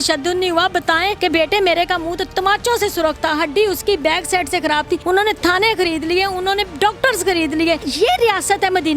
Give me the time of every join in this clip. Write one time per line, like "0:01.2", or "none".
0:01.2
0:05.0
0:07.9